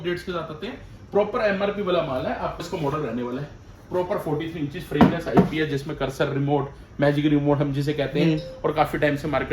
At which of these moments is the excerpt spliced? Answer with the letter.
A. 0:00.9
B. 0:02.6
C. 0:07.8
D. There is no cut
B